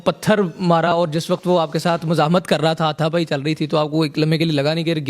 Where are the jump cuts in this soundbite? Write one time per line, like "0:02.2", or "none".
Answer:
0:00.9